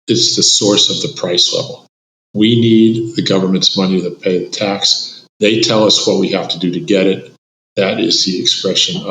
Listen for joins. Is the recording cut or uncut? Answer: uncut